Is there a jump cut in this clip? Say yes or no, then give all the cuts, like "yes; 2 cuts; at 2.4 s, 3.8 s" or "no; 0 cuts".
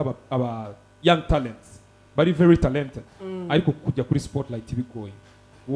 no; 0 cuts